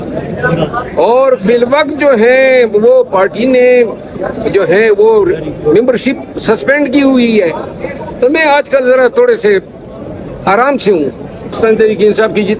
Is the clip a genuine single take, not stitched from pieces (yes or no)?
no